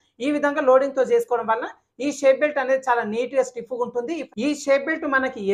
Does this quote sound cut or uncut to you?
cut